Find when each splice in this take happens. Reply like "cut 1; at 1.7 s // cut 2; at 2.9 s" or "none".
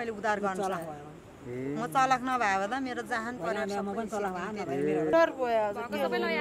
cut 1; at 5.1 s